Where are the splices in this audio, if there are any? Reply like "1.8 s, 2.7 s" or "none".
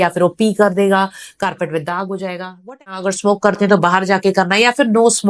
3.0 s